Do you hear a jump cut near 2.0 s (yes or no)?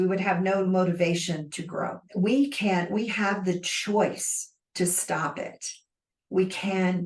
yes